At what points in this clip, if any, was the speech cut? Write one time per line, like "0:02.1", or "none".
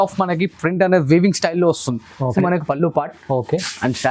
0:02.3